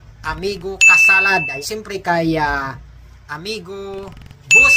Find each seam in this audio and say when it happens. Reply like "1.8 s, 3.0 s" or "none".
1.6 s